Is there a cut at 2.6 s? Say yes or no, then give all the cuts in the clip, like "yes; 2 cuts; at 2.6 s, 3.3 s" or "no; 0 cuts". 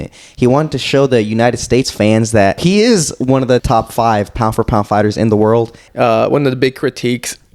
yes; 3 cuts; at 2.6 s, 3.6 s, 5.8 s